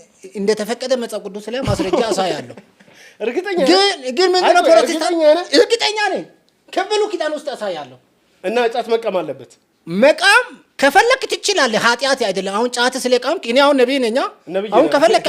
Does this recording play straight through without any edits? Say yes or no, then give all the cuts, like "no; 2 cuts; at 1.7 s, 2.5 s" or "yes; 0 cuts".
yes; 0 cuts